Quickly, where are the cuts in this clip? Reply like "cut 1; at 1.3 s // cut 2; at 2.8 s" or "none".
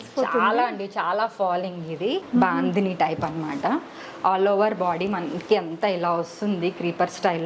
cut 1; at 2.2 s